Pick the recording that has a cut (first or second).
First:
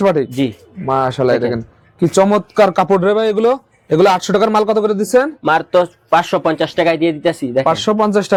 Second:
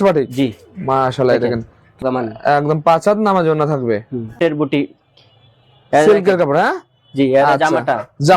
second